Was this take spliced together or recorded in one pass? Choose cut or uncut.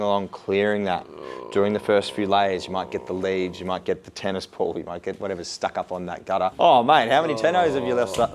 cut